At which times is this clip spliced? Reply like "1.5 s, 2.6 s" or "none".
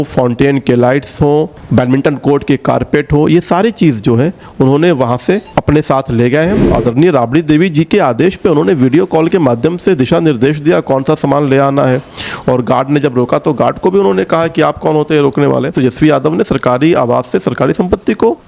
1.6 s, 5.5 s, 6.6 s, 15.7 s